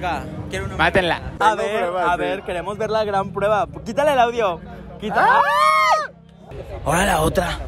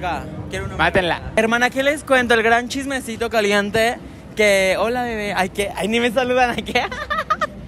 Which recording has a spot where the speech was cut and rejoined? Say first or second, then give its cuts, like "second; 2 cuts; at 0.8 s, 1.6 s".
first; 2 cuts; at 1.2 s, 6.6 s